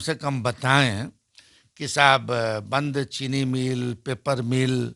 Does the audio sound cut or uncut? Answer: uncut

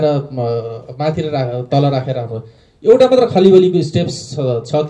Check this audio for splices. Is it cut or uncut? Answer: uncut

